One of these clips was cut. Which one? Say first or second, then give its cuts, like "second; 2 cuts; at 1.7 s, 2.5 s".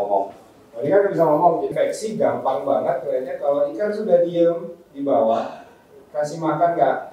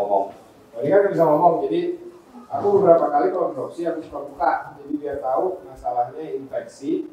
first; 1 cut; at 1.7 s